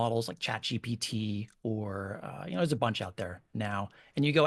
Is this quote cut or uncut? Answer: uncut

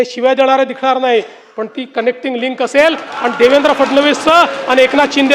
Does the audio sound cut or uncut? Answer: uncut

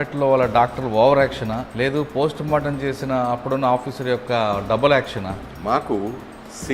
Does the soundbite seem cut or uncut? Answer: cut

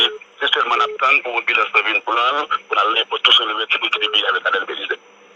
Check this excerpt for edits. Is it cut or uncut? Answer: uncut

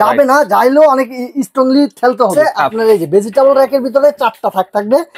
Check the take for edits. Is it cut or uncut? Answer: cut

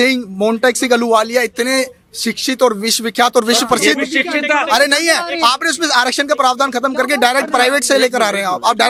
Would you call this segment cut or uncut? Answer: uncut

